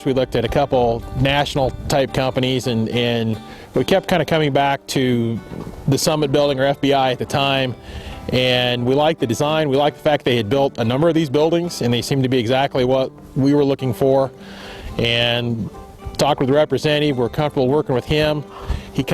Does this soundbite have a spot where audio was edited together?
no; 0 cuts

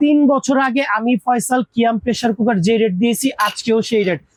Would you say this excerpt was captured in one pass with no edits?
yes; 0 cuts

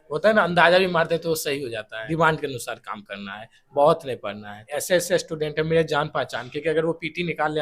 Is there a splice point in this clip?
yes; 2 cuts; at 2.0 s, 4.6 s

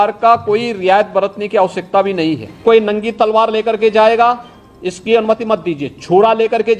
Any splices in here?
yes; 1 cut; at 2.6 s

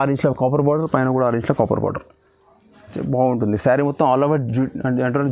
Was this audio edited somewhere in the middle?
no; 0 cuts

